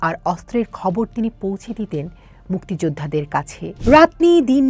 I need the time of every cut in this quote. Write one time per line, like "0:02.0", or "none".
0:03.6